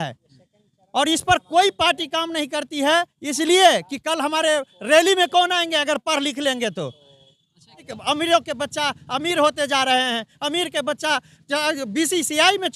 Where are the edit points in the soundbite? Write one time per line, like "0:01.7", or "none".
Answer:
0:07.9